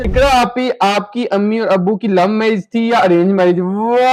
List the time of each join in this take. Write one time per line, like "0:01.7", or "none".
none